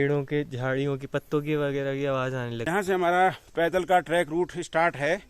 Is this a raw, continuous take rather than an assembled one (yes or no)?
no